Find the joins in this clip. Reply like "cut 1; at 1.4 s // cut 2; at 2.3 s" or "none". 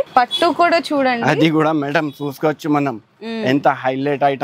none